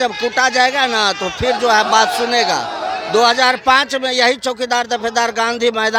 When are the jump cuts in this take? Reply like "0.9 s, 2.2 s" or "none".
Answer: none